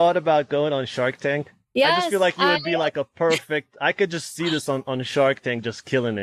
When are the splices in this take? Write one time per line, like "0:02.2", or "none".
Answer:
0:01.6